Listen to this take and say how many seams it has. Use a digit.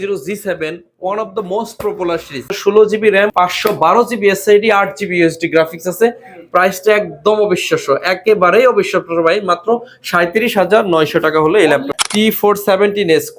3